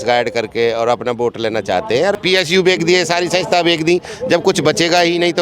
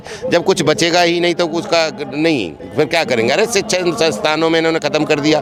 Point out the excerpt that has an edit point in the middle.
first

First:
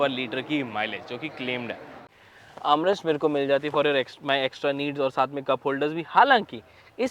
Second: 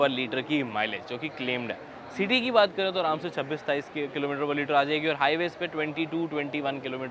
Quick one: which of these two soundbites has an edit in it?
first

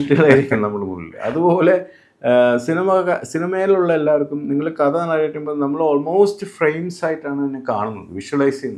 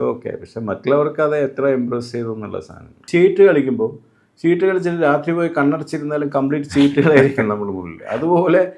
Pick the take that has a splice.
second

